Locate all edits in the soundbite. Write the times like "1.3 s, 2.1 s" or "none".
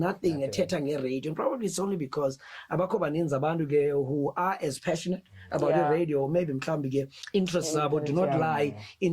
7.2 s